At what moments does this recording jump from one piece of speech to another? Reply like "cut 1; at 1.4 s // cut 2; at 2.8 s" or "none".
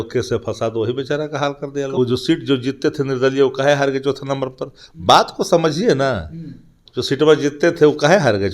cut 1; at 1.9 s